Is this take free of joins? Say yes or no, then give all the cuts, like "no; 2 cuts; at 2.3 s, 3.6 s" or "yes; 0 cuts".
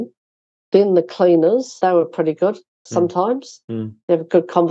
no; 1 cut; at 1.8 s